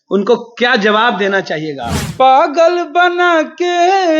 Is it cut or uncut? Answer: cut